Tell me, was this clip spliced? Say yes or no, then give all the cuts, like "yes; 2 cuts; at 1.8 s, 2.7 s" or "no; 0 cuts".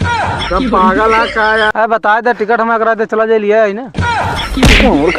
yes; 1 cut; at 1.7 s